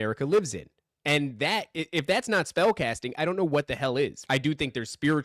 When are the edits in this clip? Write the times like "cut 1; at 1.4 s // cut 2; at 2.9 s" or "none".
cut 1; at 4.2 s